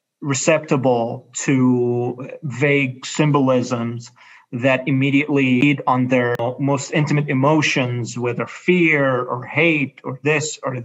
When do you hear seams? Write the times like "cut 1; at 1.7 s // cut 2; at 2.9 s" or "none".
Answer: cut 1; at 5.6 s // cut 2; at 6.4 s